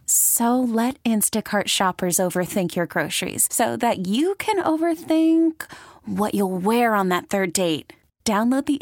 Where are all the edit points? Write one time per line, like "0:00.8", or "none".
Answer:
none